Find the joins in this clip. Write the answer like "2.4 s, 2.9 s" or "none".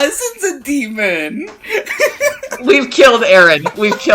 2.7 s